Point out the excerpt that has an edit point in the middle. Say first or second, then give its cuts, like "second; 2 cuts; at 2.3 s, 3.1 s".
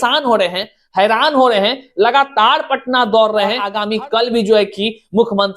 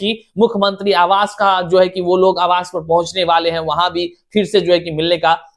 first; 1 cut; at 3.7 s